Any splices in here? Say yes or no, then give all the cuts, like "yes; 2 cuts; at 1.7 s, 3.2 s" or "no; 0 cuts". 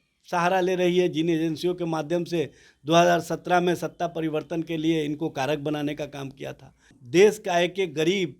yes; 1 cut; at 7.0 s